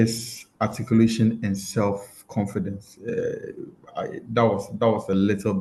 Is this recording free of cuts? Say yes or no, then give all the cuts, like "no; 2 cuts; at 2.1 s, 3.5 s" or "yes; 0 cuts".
yes; 0 cuts